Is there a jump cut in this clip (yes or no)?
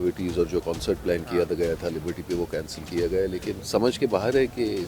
yes